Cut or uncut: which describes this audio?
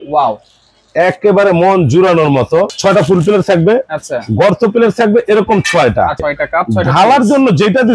cut